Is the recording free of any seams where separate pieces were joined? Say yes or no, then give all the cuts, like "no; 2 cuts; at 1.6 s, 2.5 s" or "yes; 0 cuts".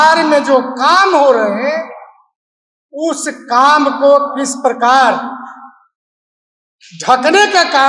yes; 0 cuts